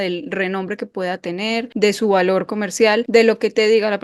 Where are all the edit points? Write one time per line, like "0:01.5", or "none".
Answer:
0:01.7
0:03.0